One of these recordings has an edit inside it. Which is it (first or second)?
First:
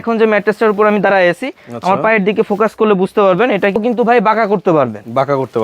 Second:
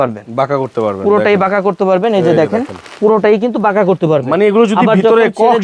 first